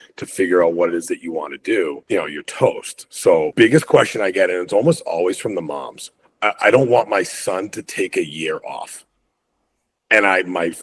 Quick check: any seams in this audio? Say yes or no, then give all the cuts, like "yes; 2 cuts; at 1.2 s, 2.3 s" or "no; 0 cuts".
yes; 2 cuts; at 2.0 s, 3.5 s